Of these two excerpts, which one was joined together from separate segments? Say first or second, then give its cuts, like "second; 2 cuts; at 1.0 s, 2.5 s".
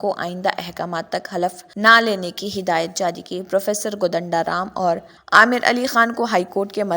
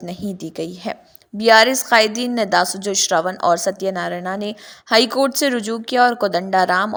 first; 2 cuts; at 1.6 s, 5.1 s